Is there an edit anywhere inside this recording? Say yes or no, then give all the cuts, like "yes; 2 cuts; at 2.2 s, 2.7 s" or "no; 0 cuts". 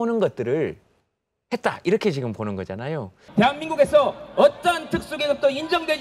yes; 1 cut; at 3.1 s